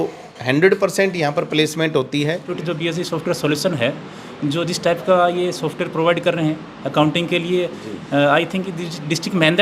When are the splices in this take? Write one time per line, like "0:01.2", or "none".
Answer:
0:02.5